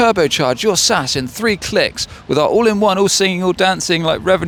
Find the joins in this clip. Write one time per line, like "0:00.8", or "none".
none